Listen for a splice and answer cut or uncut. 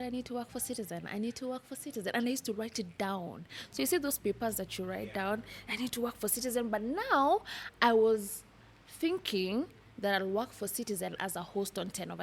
uncut